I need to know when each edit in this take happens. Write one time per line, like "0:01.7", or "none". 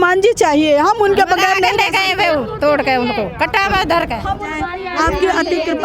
0:04.5